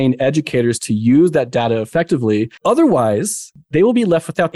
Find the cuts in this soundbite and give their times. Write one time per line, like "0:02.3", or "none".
0:02.5
0:03.5